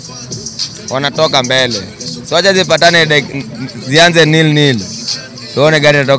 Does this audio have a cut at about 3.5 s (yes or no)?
no